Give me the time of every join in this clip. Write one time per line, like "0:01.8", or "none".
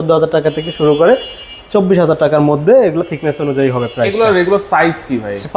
none

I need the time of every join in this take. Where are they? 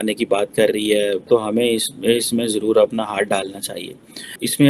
none

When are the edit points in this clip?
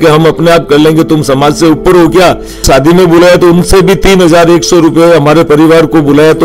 0:02.7

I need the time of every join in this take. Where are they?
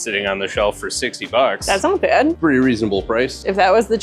0:02.4

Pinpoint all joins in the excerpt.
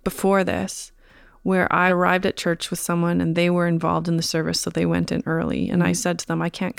0:01.9

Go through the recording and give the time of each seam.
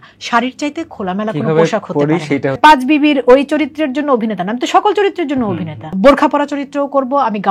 0:02.6
0:05.9

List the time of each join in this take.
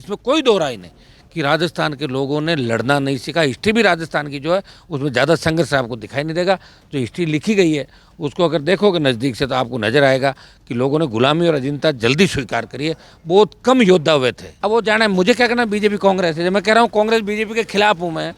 0:14.5

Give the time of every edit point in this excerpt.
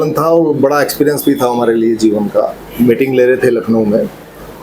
0:02.6

